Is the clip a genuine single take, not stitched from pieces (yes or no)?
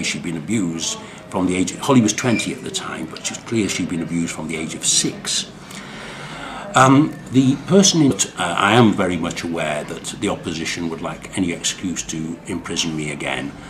yes